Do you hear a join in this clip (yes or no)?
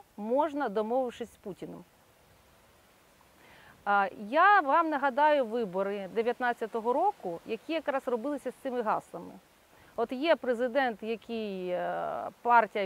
no